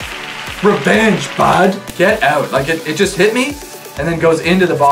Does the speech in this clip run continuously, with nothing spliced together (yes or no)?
no